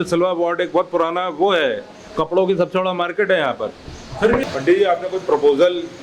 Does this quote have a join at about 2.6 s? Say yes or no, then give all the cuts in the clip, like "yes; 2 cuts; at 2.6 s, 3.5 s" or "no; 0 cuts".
no; 1 cut; at 4.4 s